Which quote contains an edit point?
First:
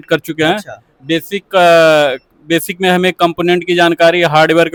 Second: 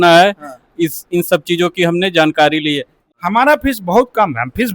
second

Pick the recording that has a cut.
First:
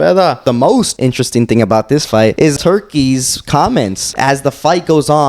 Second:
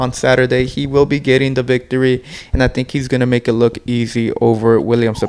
first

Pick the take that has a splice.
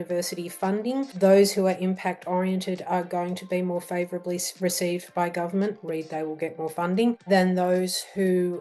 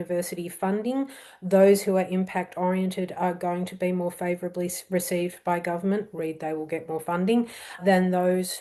first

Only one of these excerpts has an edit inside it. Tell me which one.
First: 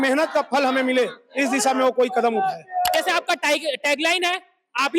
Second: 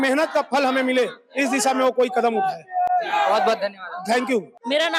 first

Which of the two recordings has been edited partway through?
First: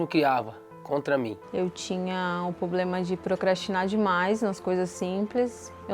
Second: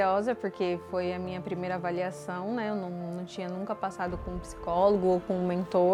first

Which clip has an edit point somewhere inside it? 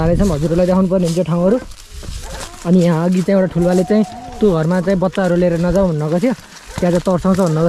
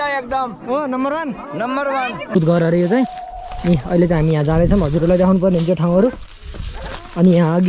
second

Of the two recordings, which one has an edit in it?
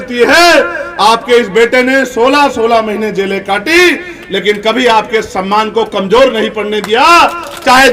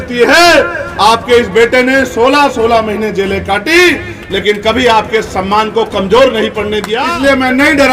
second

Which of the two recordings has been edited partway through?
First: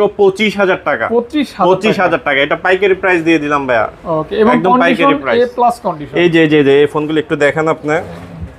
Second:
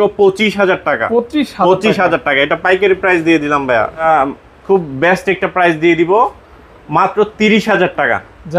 second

